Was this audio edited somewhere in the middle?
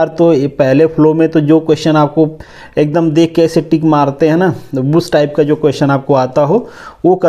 no; 0 cuts

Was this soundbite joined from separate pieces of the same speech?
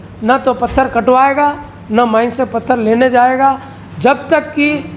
no; 0 cuts

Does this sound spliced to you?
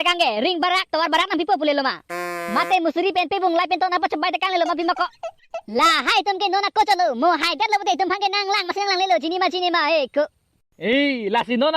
yes; 1 cut; at 5.2 s

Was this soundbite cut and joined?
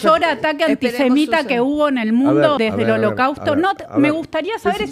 yes; 1 cut; at 2.6 s

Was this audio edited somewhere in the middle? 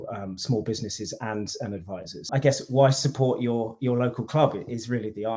yes; 1 cut; at 2.3 s

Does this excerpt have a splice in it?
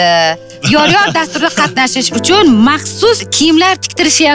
yes; 1 cut; at 3.3 s

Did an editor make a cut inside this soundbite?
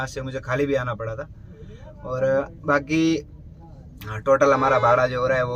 no; 0 cuts

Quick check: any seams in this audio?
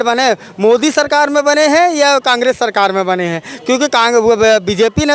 no; 0 cuts

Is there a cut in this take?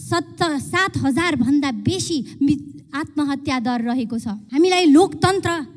yes; 1 cut; at 4.4 s

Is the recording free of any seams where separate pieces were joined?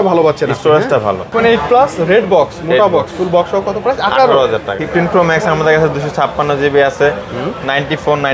no; 2 cuts; at 1.3 s, 4.8 s

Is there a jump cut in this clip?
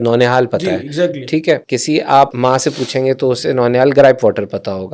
yes; 2 cuts; at 1.6 s, 2.3 s

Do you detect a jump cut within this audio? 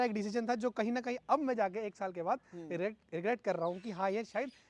no; 0 cuts

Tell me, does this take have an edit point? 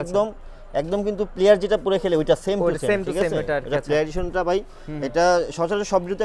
no; 0 cuts

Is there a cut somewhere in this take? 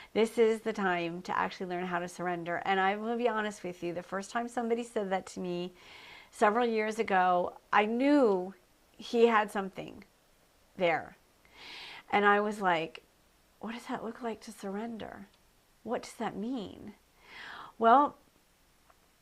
no; 0 cuts

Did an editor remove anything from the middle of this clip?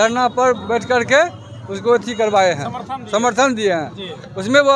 no; 0 cuts

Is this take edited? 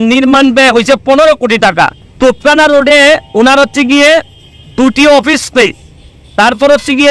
no; 0 cuts

